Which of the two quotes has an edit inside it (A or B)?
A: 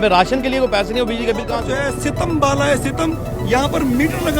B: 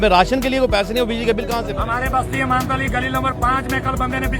B